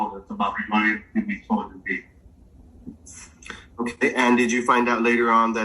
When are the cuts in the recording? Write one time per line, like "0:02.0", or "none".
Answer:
none